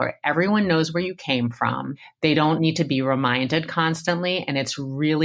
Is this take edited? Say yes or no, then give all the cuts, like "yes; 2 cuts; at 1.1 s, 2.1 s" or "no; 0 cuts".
yes; 1 cut; at 2.0 s